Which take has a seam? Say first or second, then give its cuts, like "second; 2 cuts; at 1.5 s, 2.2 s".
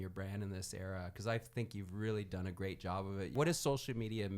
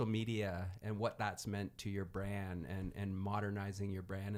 first; 1 cut; at 3.5 s